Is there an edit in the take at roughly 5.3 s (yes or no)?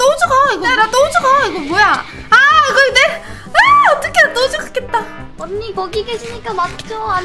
yes